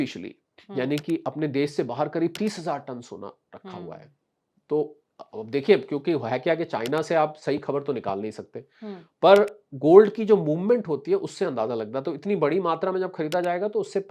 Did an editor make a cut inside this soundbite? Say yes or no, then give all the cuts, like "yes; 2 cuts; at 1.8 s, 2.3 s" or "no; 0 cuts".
no; 0 cuts